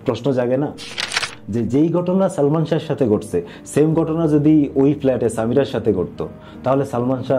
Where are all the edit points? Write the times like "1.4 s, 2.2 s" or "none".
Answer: 1.3 s